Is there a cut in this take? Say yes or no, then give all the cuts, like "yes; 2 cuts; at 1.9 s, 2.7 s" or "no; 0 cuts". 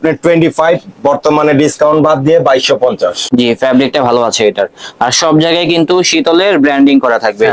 yes; 1 cut; at 3.2 s